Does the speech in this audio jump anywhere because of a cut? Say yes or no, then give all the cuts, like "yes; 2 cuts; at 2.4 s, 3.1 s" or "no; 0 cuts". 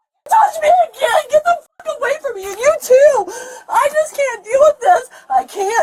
no; 0 cuts